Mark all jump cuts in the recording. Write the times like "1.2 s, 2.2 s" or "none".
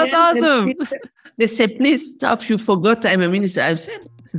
1.2 s

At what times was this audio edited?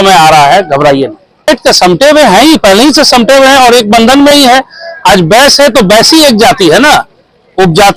none

